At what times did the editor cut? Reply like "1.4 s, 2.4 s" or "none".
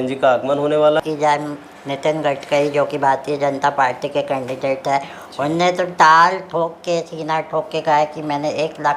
1.0 s